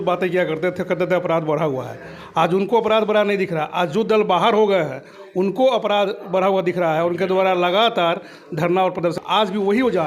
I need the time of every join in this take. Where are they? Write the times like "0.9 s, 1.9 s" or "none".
9.2 s